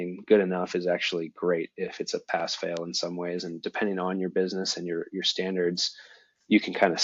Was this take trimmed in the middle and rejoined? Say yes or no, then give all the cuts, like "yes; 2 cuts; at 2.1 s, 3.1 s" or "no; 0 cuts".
no; 0 cuts